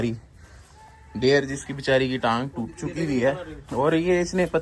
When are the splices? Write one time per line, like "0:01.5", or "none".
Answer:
none